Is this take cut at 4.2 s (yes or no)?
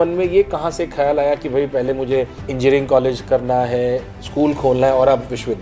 no